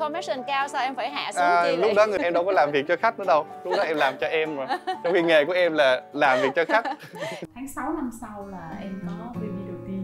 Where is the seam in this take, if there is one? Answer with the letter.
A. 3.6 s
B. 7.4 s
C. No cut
B